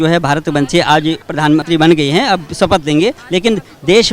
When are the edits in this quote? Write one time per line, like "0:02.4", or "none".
0:01.5
0:03.2